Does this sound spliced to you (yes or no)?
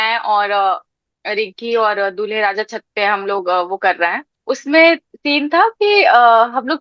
yes